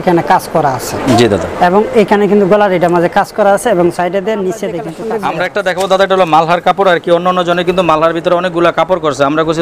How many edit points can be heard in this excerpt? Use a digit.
1